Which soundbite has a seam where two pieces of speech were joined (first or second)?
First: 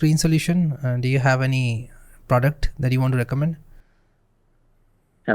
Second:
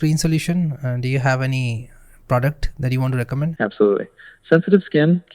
second